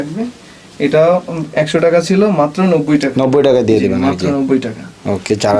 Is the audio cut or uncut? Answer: uncut